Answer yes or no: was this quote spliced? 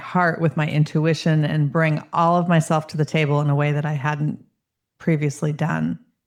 no